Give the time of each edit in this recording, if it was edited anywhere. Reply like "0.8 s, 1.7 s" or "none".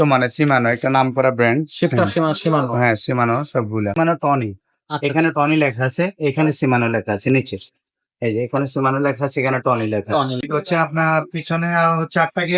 4.0 s, 10.5 s